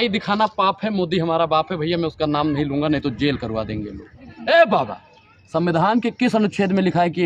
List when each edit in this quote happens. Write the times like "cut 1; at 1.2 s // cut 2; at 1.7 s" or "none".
cut 1; at 4.2 s